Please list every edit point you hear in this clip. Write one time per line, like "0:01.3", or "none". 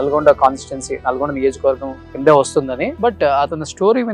0:02.9